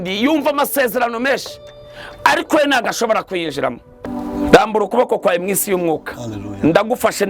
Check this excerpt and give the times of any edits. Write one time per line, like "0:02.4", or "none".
0:04.0